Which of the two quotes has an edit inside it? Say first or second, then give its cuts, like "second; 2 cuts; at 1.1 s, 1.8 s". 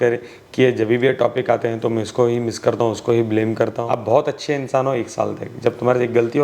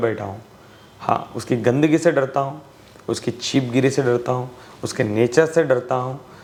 first; 1 cut; at 3.8 s